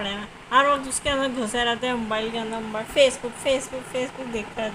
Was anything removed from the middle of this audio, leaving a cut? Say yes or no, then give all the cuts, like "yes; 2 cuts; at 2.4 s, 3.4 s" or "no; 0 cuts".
no; 0 cuts